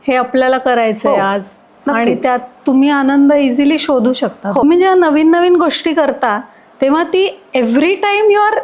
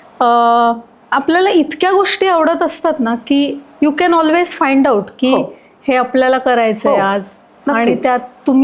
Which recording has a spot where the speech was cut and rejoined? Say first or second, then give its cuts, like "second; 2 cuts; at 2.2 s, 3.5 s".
first; 1 cut; at 4.6 s